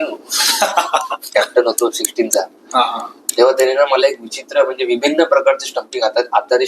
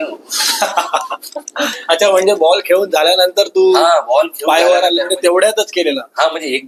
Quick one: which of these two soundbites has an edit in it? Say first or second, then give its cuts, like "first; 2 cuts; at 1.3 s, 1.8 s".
first; 1 cut; at 1.2 s